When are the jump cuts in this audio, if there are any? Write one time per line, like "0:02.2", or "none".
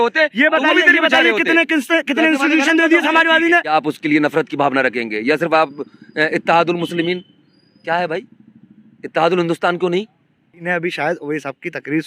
0:03.7
0:10.6